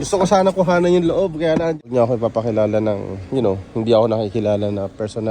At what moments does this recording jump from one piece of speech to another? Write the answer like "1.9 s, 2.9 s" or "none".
1.9 s